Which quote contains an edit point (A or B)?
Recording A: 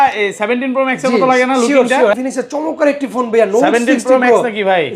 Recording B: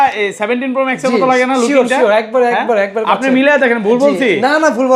A